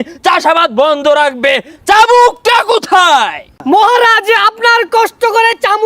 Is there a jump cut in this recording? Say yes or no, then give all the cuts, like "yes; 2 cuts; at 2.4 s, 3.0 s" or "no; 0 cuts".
yes; 1 cut; at 3.5 s